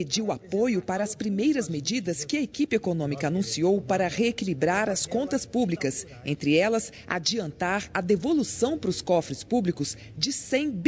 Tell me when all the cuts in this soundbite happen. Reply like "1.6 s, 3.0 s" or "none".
3.4 s